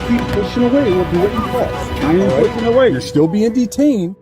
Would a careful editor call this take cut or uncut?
uncut